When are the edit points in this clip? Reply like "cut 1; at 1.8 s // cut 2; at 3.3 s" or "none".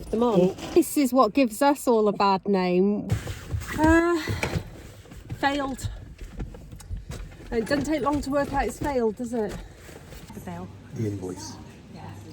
cut 1; at 0.8 s // cut 2; at 3.0 s // cut 3; at 10.3 s